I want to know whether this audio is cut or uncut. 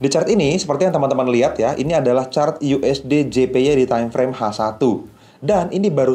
uncut